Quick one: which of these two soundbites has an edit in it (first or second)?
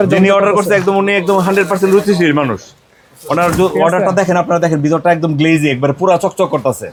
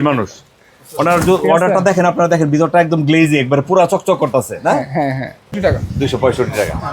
second